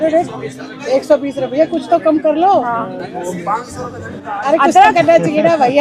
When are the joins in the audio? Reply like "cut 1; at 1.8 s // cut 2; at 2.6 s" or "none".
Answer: none

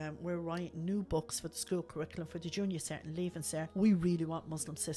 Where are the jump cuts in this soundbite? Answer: cut 1; at 3.7 s

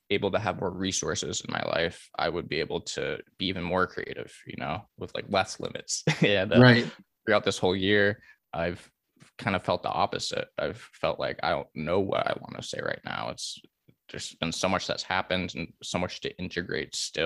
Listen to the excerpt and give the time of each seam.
cut 1; at 8.3 s

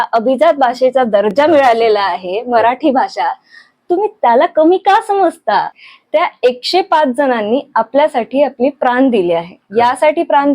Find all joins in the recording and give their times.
cut 1; at 5.8 s

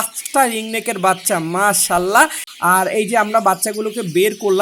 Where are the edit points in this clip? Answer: cut 1; at 2.4 s

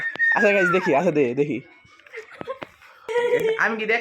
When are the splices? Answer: cut 1; at 3.1 s

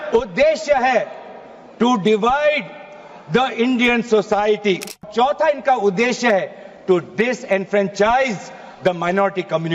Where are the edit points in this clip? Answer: cut 1; at 5.1 s

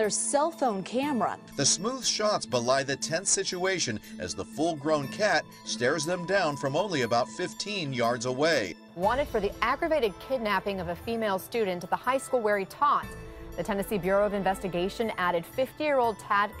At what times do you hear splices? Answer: cut 1; at 11.9 s

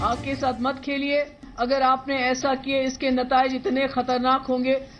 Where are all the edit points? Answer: cut 1; at 1.4 s

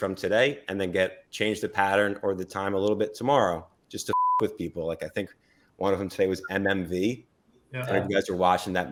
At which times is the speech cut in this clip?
none

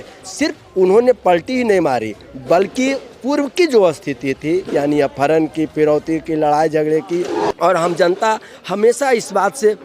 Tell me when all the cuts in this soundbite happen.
cut 1; at 7.4 s

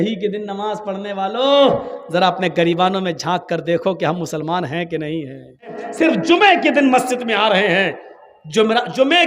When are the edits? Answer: cut 1; at 5.9 s

